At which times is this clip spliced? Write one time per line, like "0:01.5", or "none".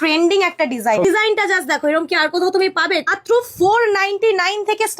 0:01.0
0:03.1